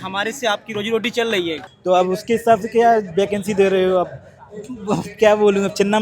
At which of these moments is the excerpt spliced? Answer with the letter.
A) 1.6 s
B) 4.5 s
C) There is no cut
A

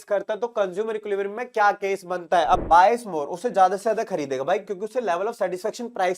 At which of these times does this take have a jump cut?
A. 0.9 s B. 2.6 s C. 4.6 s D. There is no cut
B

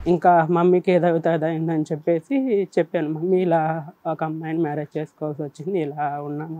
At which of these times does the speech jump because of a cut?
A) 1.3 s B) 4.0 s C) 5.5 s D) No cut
D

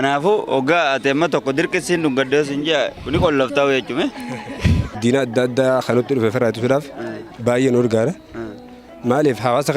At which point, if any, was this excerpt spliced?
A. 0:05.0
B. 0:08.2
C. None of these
A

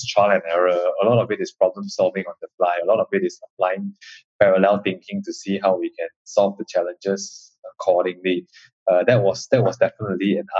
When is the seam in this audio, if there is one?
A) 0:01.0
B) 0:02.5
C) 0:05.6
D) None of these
D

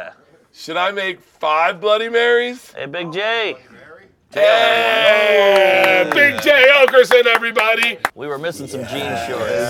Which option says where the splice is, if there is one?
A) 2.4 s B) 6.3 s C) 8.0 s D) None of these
C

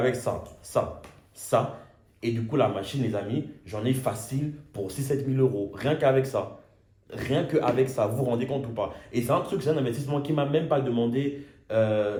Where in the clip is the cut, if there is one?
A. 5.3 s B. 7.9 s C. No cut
C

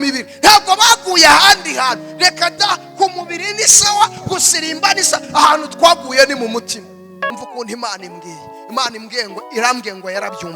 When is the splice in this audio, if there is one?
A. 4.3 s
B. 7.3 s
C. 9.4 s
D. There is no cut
B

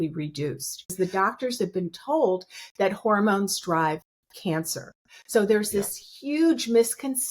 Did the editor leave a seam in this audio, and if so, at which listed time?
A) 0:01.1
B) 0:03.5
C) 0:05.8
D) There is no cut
A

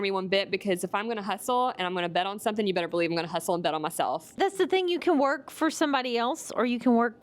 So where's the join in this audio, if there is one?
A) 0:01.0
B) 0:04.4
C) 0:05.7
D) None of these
B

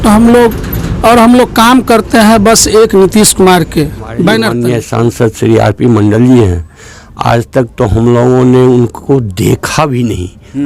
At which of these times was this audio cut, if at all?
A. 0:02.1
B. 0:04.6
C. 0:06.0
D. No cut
B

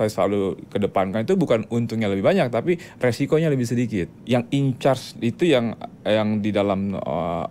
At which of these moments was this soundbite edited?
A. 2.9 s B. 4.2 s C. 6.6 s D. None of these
B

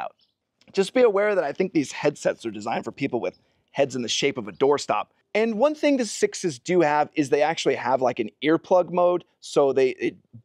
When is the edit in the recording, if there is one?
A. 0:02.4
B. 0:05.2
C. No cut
B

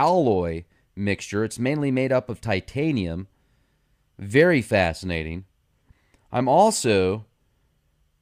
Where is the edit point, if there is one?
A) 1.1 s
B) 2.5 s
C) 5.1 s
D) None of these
C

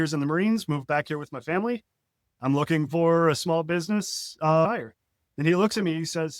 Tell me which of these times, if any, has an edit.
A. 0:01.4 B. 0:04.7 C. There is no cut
B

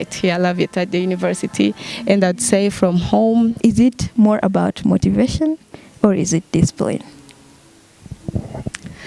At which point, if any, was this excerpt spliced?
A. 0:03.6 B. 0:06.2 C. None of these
A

